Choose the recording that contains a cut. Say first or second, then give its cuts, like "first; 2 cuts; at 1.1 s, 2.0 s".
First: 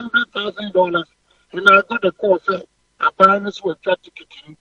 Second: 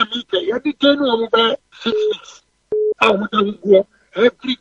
second; 1 cut; at 1.7 s